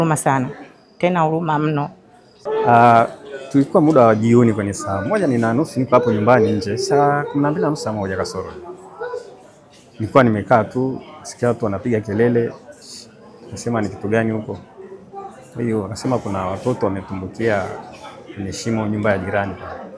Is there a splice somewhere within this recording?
yes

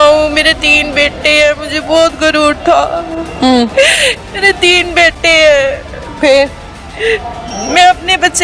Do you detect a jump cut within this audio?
no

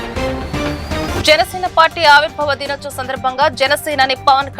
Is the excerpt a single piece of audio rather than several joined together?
yes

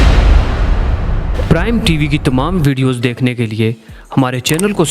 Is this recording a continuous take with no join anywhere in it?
no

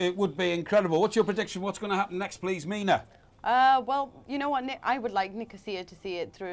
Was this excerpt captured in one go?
no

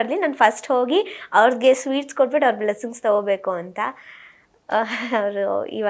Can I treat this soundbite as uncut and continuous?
yes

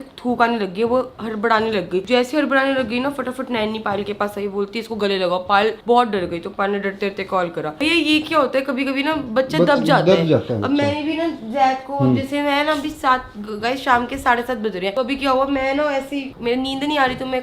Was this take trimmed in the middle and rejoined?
no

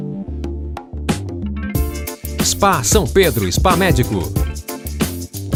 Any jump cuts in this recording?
no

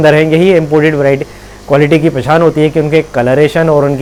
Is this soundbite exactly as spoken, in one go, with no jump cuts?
yes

